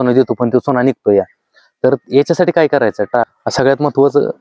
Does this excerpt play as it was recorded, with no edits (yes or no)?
no